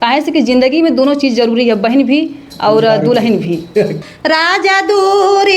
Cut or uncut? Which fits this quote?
cut